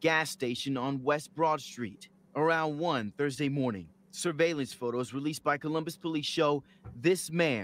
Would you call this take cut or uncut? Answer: cut